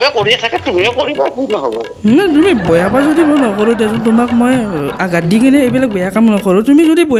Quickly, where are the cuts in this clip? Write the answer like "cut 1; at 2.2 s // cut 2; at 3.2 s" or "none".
none